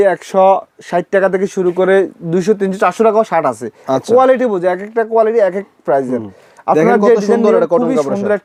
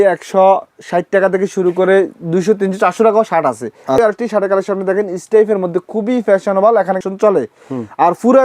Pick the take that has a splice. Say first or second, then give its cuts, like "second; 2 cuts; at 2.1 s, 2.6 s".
second; 2 cuts; at 4.0 s, 7.0 s